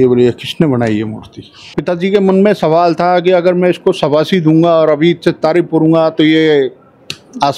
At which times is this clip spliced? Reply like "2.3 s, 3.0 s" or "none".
1.8 s